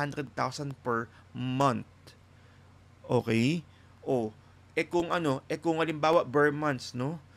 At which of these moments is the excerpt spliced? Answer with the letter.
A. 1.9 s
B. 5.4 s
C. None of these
C